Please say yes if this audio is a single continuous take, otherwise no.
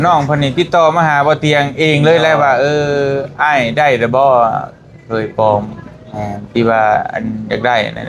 yes